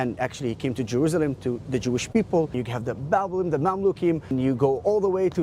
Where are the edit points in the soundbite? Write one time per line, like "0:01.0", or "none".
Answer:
0:02.6
0:04.3